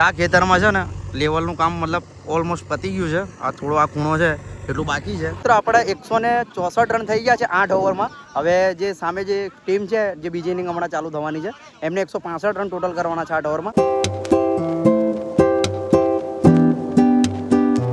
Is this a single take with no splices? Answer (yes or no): no